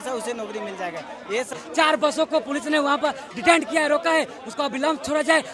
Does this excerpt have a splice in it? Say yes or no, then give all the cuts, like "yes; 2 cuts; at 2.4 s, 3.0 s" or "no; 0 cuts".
yes; 1 cut; at 1.5 s